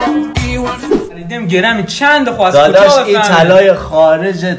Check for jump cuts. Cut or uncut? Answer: cut